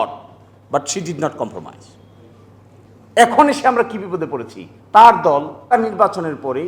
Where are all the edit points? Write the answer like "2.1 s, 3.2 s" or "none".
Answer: 5.7 s

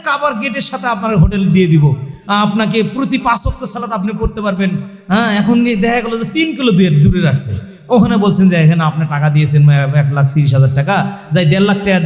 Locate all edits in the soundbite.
none

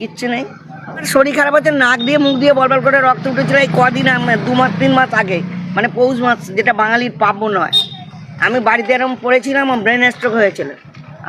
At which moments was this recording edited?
1.0 s

